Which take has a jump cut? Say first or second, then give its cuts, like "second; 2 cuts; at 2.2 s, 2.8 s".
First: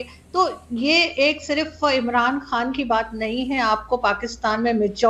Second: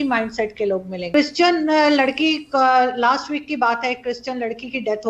second; 1 cut; at 1.0 s